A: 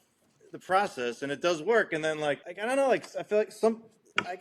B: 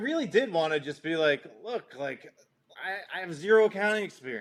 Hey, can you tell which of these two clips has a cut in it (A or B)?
A